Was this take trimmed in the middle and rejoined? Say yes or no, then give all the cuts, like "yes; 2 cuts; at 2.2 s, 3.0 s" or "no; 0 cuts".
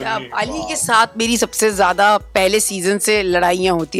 no; 0 cuts